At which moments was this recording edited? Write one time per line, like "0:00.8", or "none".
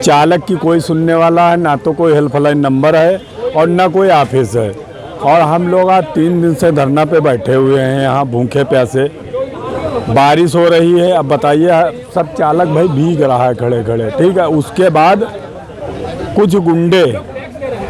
none